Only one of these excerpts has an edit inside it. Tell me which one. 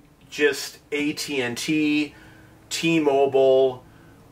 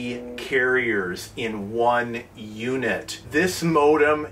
second; 1 cut; at 3.2 s

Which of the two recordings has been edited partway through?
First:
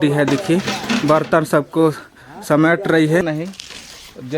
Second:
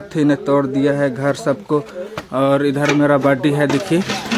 first; 1 cut; at 3.2 s

